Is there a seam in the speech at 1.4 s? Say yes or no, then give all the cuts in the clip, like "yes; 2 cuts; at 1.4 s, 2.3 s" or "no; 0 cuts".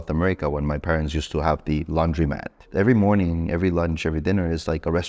no; 1 cut; at 2.6 s